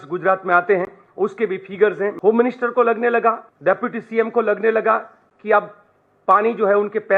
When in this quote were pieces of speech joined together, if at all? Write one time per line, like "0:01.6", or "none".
0:02.2
0:03.5